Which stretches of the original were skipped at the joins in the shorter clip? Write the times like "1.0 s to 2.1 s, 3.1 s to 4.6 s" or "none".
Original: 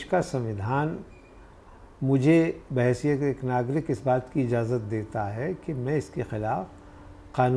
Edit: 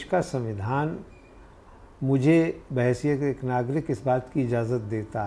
none